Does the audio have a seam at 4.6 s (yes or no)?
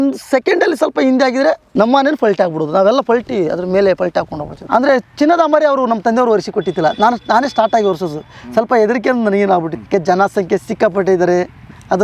yes